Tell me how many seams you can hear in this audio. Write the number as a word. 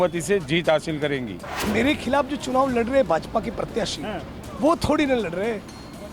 one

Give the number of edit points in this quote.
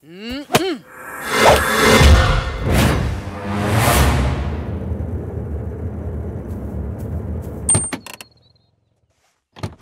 one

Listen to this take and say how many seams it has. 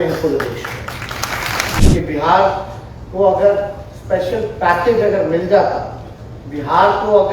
one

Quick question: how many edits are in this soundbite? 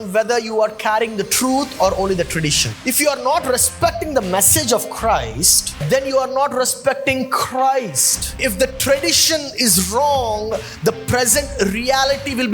three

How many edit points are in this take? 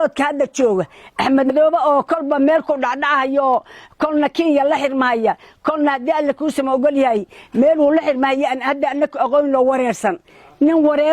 one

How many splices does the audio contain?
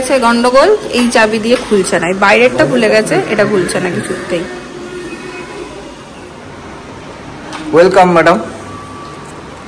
one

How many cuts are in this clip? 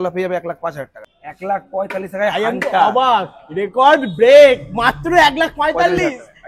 one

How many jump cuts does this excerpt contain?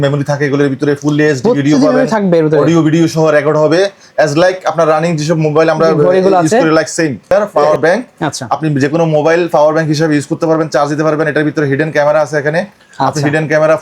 one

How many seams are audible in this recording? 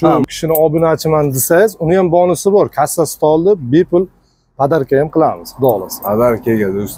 zero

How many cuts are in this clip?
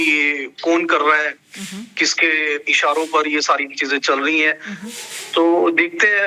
zero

